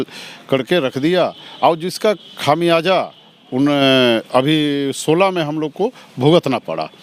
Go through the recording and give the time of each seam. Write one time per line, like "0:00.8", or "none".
none